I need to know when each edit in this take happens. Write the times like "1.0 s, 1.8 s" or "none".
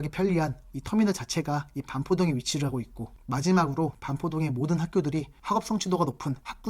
none